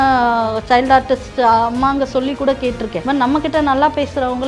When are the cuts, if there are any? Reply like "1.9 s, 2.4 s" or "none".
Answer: 3.0 s